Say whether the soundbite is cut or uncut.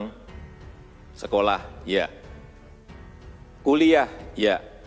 cut